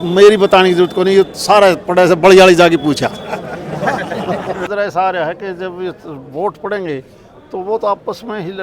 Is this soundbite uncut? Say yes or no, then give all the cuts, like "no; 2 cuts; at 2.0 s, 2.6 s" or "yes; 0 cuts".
no; 1 cut; at 4.7 s